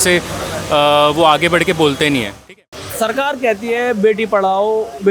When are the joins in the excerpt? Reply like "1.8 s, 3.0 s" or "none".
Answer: 2.4 s

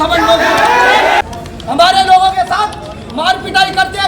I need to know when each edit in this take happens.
1.2 s

